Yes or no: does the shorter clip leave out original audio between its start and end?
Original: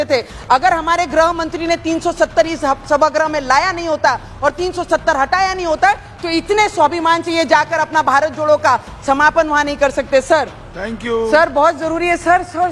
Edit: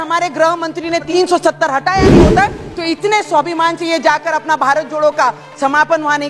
yes